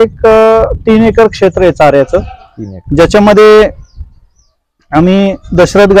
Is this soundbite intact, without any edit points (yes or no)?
yes